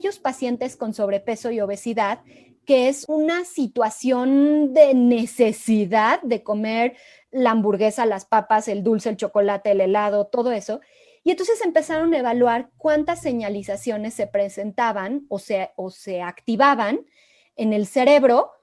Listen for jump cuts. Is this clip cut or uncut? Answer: cut